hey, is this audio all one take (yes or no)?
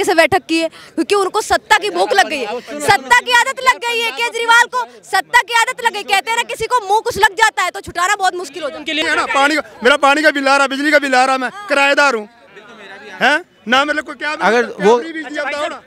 no